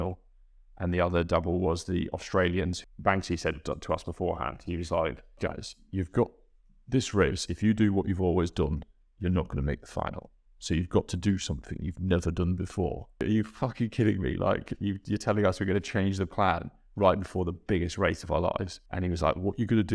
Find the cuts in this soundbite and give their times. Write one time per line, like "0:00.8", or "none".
0:02.8
0:05.4
0:13.2
0:18.8